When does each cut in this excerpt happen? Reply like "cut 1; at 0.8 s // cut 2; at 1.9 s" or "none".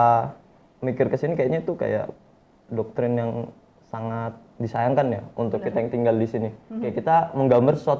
none